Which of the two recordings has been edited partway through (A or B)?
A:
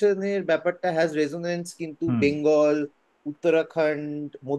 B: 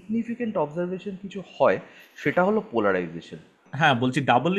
B